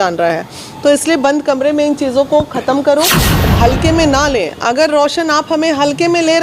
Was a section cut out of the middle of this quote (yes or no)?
yes